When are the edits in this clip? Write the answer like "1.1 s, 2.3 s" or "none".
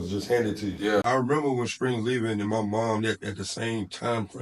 1.0 s